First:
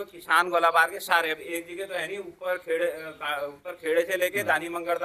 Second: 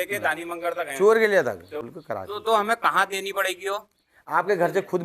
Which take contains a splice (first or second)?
second